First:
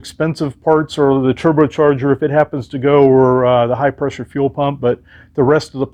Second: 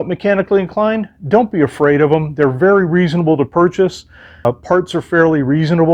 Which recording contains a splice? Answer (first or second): second